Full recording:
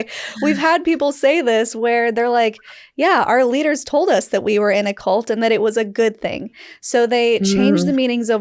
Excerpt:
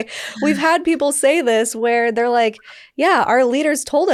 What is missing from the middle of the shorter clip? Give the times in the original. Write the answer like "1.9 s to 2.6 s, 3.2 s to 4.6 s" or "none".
none